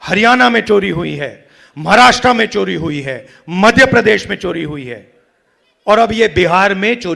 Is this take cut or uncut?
uncut